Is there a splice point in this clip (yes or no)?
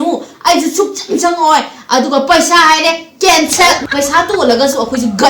yes